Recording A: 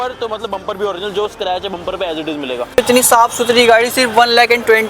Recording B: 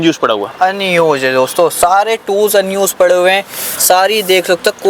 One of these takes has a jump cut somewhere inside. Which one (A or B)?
A